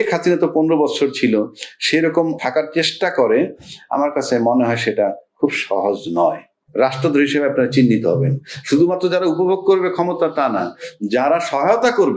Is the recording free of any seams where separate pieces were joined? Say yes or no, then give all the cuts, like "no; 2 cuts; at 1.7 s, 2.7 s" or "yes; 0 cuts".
no; 2 cuts; at 2.4 s, 6.5 s